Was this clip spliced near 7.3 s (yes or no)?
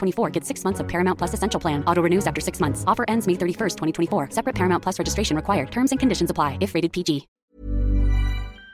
yes